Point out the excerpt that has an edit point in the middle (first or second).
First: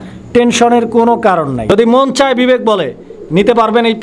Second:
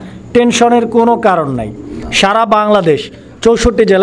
first